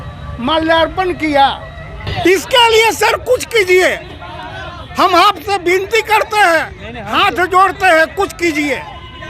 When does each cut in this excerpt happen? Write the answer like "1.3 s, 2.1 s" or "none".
2.1 s